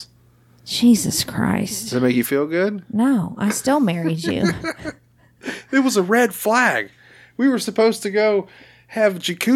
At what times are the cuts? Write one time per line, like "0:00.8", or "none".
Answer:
none